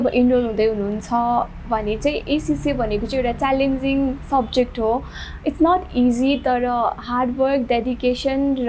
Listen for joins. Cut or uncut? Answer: uncut